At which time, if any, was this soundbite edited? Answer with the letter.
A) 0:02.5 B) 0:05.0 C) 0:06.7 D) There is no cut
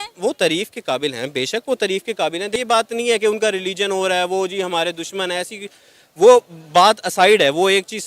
A